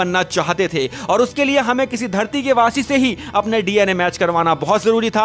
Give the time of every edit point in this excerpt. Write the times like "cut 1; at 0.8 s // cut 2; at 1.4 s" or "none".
none